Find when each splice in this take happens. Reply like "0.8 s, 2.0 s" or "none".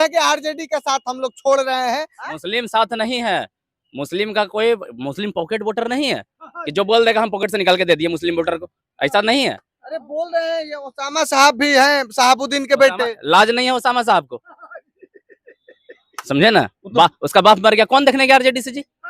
2.1 s